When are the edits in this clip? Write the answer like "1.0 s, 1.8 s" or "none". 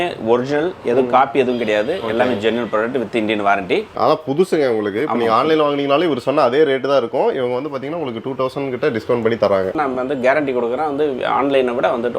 3.9 s, 9.7 s